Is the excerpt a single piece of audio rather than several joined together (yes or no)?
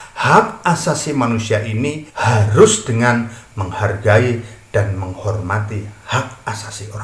no